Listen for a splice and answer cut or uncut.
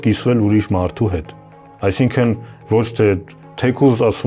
uncut